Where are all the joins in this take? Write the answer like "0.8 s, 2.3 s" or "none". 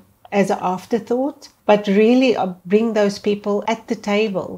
1.5 s, 2.5 s, 3.6 s